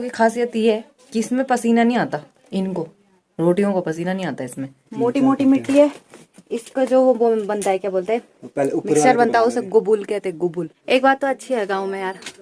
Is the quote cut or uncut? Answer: cut